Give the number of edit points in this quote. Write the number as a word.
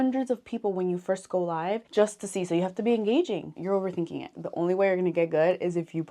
one